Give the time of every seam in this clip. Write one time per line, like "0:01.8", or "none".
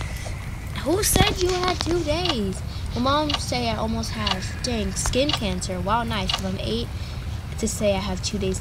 none